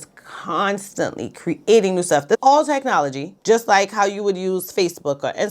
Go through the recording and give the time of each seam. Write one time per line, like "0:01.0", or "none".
0:02.4